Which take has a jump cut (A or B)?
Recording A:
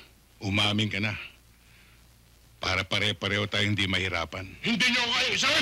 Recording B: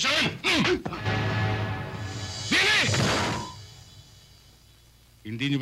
A